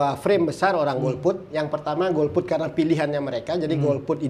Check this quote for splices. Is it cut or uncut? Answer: uncut